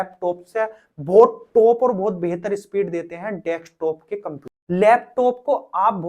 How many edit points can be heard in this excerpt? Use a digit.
1